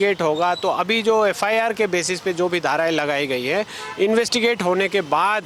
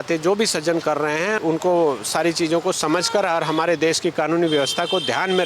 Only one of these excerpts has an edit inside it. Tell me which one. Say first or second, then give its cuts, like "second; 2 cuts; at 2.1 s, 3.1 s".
second; 1 cut; at 1.4 s